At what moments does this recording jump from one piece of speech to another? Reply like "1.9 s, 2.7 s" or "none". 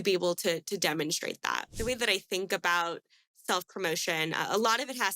1.7 s